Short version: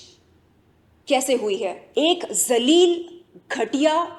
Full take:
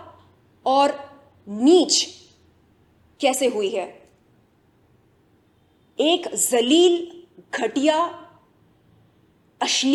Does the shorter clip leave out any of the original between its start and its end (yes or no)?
yes